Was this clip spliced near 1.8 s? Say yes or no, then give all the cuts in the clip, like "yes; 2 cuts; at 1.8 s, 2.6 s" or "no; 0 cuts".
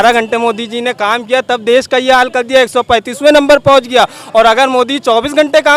no; 0 cuts